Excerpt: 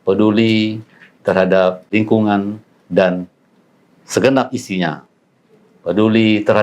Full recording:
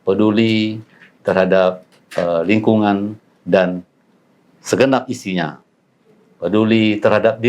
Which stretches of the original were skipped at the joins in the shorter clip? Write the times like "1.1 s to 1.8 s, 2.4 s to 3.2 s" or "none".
1.9 s to 2.4 s